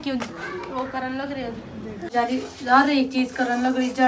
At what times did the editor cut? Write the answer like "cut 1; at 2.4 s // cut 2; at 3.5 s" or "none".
cut 1; at 2.1 s